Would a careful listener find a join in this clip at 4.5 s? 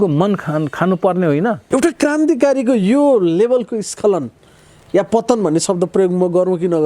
no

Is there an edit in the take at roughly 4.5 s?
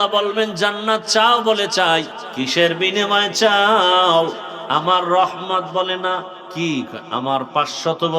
yes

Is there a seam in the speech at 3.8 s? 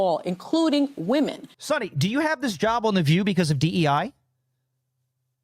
no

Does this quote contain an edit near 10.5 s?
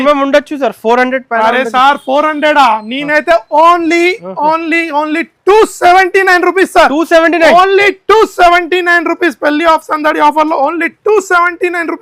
no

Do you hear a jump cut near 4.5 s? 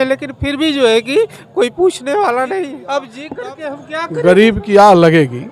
no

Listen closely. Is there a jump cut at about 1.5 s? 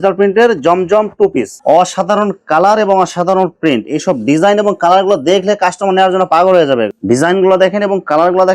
yes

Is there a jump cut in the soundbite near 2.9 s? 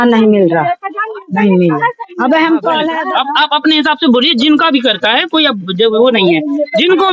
yes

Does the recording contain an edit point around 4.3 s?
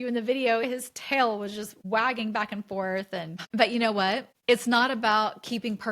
yes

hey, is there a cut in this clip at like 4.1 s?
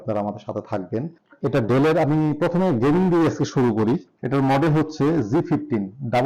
yes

